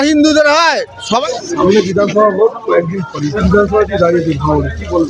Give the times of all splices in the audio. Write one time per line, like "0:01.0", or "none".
0:01.2
0:03.4